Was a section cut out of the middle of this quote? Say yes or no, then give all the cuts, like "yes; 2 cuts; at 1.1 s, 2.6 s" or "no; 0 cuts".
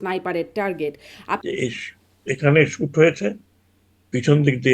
yes; 1 cut; at 1.4 s